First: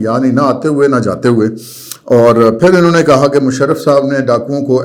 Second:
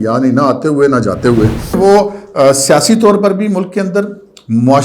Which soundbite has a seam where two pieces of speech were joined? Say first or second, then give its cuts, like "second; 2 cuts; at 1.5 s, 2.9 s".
second; 1 cut; at 1.8 s